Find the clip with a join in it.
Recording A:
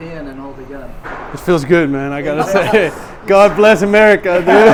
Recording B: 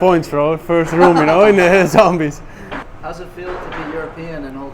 B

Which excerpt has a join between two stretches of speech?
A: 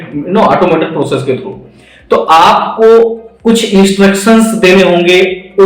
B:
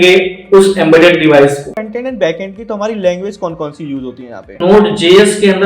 B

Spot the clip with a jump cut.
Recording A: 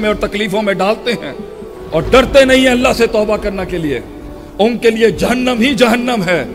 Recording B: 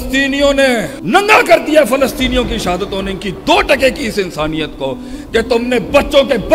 B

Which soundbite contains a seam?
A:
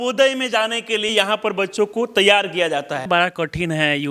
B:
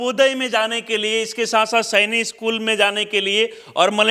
A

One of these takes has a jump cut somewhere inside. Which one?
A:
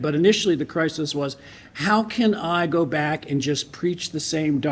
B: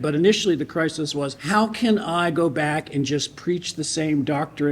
B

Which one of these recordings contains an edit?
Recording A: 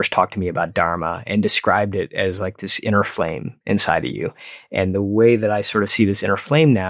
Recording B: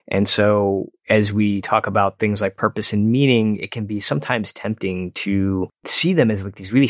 B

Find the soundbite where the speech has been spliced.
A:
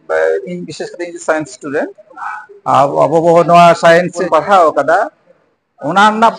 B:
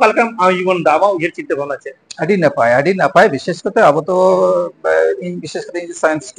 A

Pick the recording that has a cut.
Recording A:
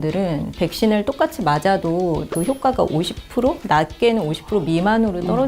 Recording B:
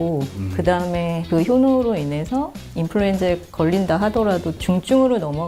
A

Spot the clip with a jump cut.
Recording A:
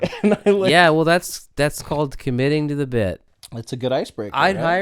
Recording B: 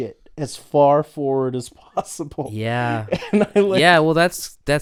A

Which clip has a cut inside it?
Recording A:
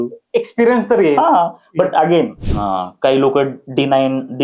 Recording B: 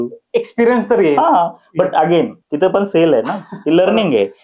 A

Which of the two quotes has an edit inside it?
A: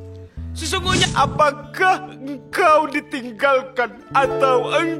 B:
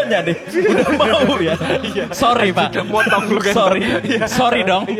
A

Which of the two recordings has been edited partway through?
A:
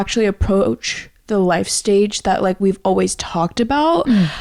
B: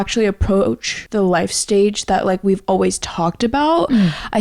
B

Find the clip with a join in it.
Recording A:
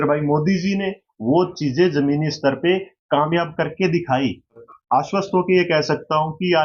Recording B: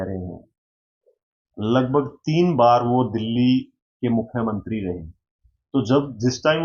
A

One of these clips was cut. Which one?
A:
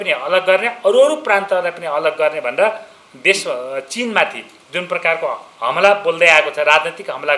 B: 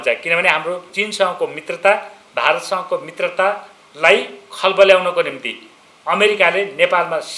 B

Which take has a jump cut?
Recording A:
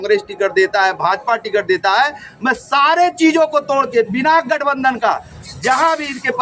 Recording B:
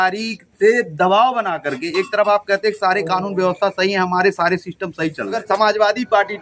B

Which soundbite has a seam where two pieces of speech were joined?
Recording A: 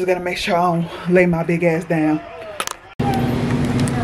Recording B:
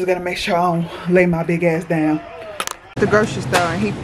B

